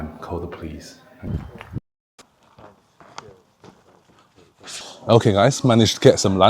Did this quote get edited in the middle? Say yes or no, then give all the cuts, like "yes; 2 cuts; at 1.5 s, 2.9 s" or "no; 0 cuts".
yes; 2 cuts; at 1.3 s, 4.7 s